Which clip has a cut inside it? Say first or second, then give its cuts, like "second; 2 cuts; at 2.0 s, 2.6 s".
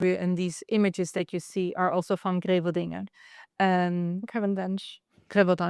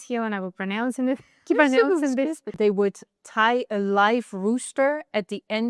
second; 1 cut; at 2.4 s